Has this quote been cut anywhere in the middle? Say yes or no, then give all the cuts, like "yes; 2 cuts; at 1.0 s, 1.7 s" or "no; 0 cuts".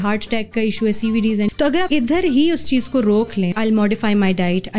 yes; 2 cuts; at 1.8 s, 3.5 s